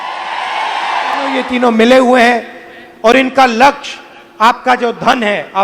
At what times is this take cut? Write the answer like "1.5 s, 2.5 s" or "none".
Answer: 1.4 s